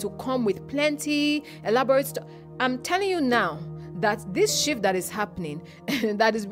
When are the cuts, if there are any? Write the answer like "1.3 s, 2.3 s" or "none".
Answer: none